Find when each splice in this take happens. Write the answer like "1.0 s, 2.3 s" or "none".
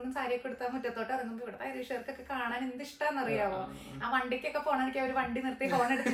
none